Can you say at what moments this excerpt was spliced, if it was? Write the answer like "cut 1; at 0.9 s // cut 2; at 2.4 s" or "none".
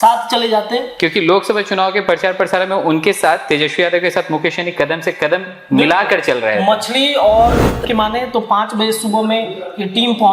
cut 1; at 7.8 s